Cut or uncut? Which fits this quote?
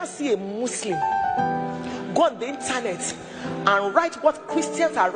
uncut